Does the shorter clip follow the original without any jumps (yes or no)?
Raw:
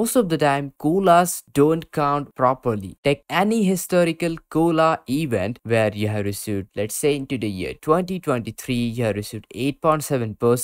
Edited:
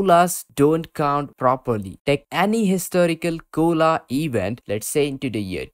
no